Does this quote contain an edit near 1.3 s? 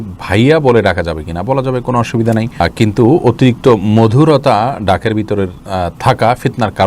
no; 0 cuts

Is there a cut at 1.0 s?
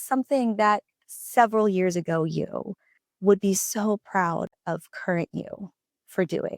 yes; 1 cut; at 1.0 s

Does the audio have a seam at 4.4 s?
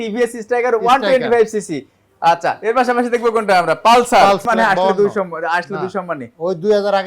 yes; 1 cut; at 4.4 s

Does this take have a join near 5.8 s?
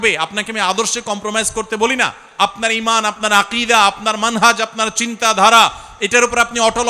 no; 0 cuts

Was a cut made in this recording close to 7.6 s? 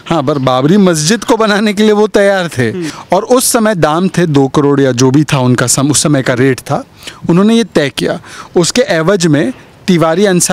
no; 1 cut; at 2.9 s

